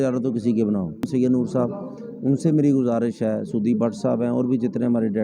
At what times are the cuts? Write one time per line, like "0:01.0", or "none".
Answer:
0:01.1